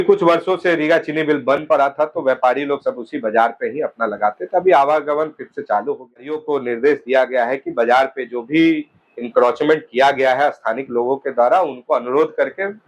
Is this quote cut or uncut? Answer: cut